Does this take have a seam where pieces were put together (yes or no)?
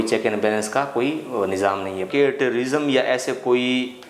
yes